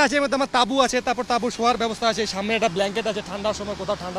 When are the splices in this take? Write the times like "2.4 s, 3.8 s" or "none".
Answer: none